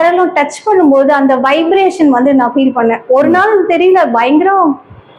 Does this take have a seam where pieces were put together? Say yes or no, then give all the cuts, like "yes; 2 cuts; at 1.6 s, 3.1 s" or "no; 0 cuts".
no; 0 cuts